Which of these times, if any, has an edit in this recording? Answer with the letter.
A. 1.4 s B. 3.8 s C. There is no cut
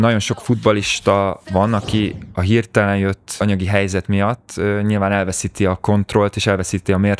A